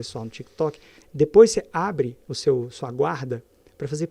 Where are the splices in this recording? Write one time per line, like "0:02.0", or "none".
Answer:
0:01.0
0:02.2